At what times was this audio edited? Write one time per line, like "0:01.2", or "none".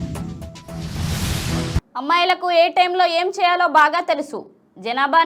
none